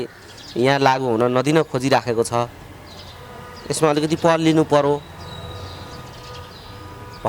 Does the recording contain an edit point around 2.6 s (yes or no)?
no